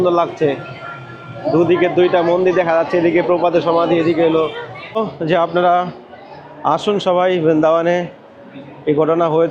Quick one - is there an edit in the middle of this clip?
yes; 1 cut; at 5.0 s

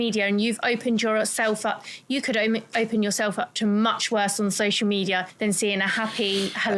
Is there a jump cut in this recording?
yes; 1 cut; at 5.3 s

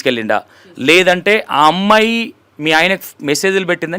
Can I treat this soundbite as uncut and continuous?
yes; 0 cuts

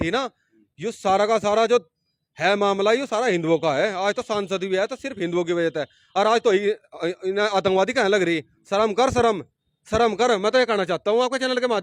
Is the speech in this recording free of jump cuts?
yes; 0 cuts

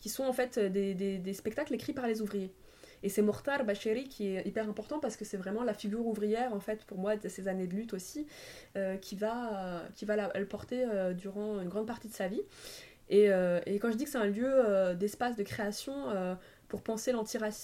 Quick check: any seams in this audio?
no; 0 cuts

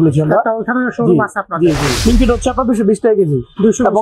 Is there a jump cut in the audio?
yes; 1 cut; at 1.9 s

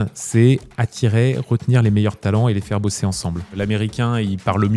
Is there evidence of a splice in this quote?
yes; 1 cut; at 3.6 s

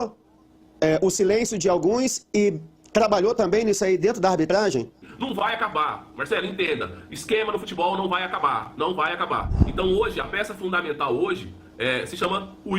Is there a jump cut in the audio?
yes; 2 cuts; at 5.1 s, 9.6 s

